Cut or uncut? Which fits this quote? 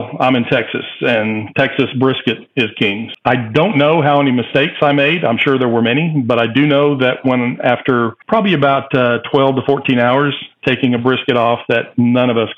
cut